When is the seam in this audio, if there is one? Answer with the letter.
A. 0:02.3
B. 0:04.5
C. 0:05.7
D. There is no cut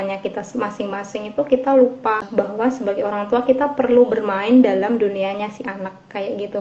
A